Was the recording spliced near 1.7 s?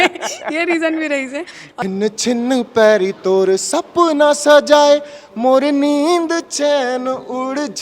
yes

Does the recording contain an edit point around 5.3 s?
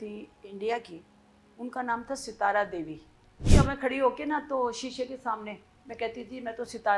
no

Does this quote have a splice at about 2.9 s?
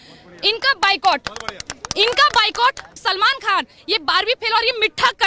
yes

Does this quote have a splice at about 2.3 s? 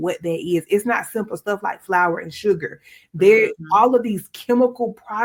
no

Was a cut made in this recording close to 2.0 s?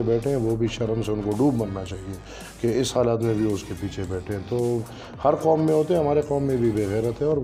no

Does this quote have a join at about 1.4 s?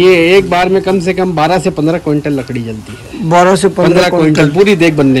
no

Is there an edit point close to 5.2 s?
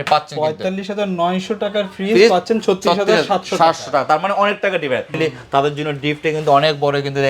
yes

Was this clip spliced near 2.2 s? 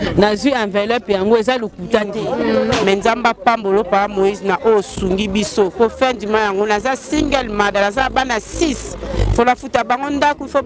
yes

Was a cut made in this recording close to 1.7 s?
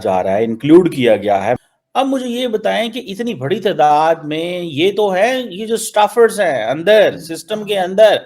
yes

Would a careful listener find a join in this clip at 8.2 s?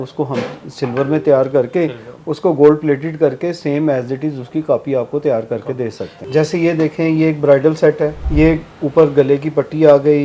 yes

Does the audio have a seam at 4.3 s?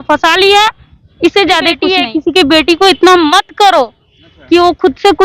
no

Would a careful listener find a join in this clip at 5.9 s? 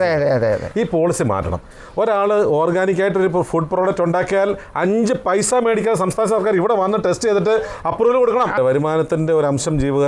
no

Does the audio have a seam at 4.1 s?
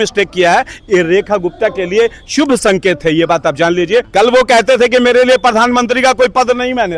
yes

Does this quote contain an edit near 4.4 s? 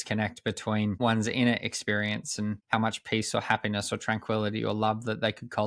no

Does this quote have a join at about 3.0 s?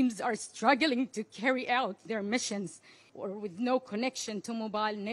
yes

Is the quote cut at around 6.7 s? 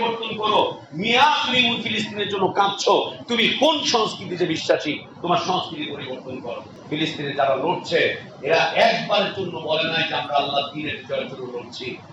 yes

